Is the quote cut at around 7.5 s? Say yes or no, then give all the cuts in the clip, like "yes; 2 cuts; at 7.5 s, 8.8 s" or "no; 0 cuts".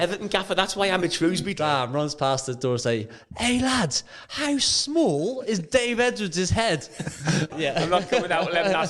yes; 2 cuts; at 1.5 s, 7.5 s